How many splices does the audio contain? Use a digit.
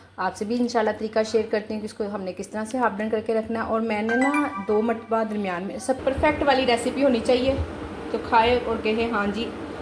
1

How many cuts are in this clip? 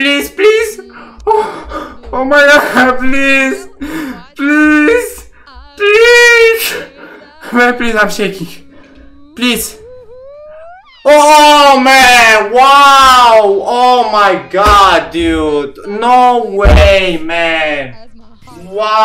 0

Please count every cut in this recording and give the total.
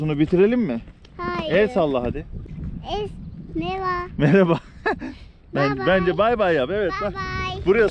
1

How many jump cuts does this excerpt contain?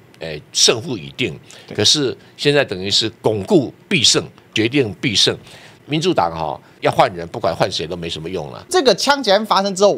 4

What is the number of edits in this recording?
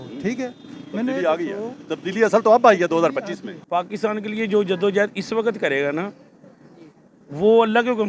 1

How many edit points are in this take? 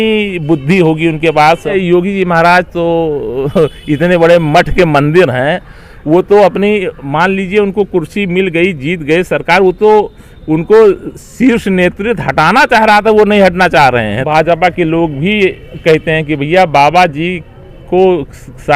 2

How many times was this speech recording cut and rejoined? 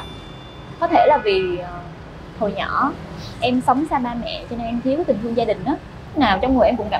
1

